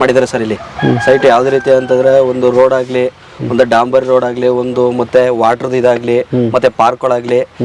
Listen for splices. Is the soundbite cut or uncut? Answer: uncut